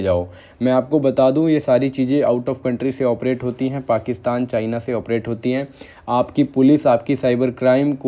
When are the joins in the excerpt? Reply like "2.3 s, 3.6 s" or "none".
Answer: none